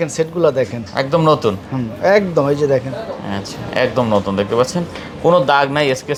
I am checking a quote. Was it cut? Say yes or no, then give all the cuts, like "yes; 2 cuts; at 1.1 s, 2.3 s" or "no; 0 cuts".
no; 0 cuts